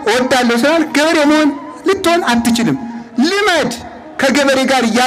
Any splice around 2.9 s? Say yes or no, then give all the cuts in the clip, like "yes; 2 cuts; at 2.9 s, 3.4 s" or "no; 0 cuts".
no; 0 cuts